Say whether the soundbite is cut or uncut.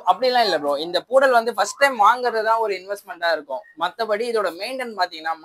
uncut